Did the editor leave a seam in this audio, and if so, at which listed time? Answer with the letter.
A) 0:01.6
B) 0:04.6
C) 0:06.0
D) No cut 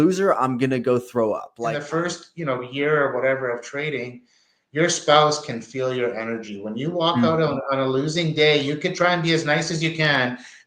A